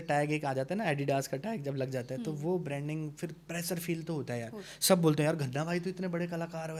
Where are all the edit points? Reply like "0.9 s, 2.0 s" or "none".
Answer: none